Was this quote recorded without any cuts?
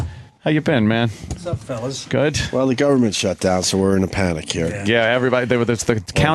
yes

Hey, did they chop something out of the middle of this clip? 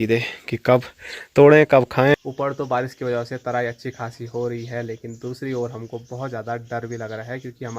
yes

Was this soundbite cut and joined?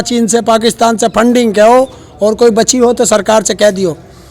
no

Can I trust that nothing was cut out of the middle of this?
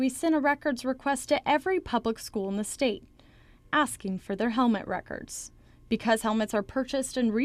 yes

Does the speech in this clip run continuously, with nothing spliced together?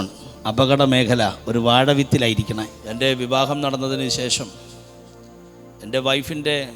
no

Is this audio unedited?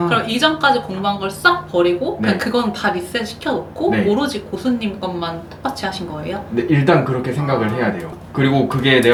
yes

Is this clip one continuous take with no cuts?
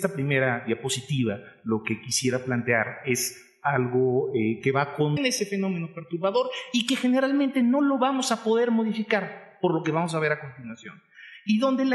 yes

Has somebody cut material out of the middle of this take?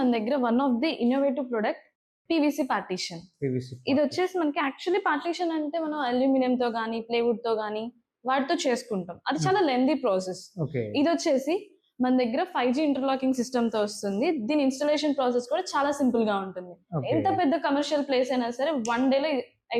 no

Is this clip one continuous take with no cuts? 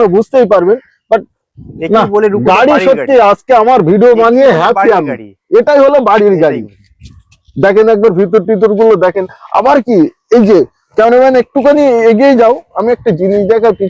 yes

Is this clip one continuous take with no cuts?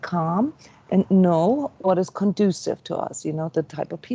no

